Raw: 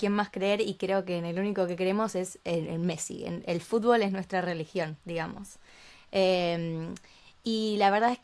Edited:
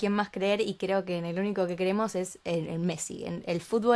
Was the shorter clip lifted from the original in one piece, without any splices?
yes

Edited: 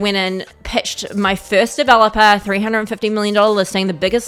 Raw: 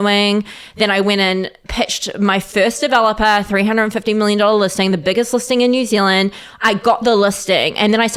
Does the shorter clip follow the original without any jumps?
yes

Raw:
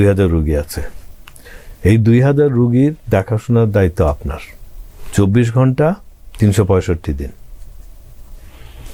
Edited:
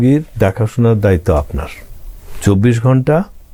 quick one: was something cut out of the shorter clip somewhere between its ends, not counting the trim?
no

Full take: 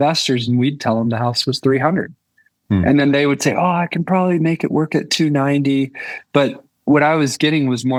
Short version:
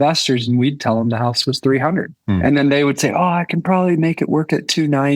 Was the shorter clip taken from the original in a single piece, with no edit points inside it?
no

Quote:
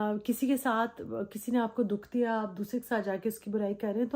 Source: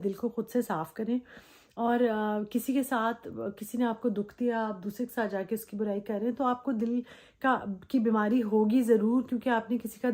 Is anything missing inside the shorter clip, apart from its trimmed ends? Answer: no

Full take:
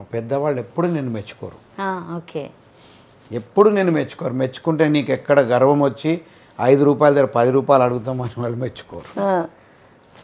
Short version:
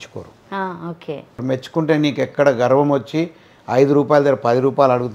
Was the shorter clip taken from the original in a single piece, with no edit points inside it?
no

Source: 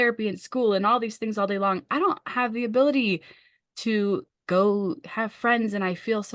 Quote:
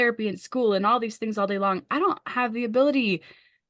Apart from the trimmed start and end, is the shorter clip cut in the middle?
no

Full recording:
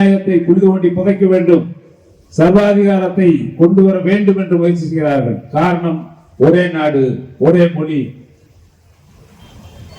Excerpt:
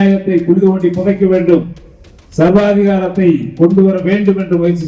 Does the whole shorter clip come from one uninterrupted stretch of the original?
yes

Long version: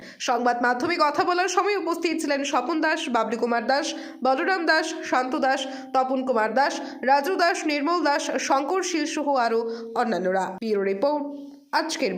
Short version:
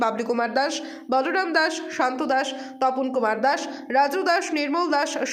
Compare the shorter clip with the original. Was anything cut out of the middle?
no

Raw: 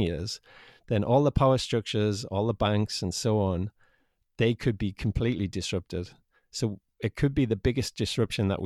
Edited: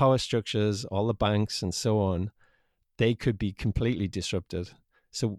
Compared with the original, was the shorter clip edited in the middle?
no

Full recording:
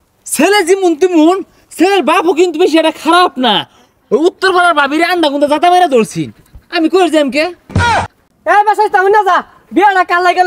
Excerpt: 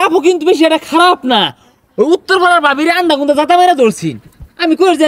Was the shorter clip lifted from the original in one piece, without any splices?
yes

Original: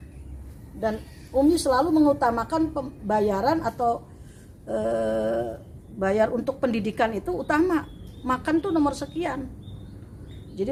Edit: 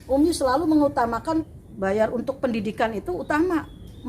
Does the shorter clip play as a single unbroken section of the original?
no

